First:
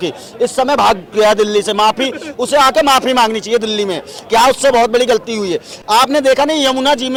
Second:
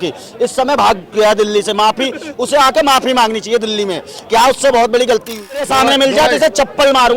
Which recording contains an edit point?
second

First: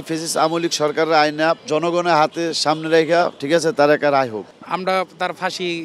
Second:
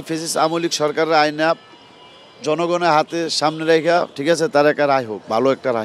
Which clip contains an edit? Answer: first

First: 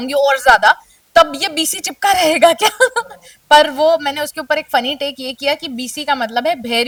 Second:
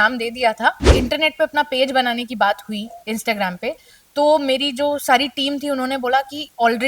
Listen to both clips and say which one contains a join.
second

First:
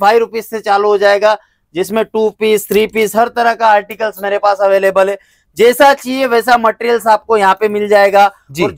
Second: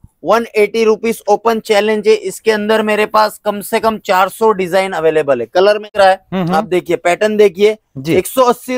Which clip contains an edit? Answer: second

